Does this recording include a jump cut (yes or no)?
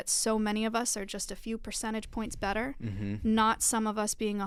no